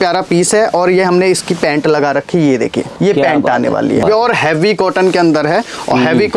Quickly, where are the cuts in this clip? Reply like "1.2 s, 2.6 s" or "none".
4.0 s